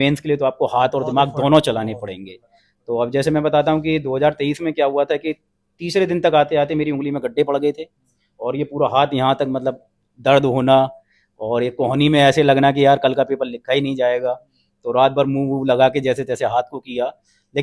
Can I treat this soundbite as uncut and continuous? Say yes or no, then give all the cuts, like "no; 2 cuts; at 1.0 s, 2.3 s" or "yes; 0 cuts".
yes; 0 cuts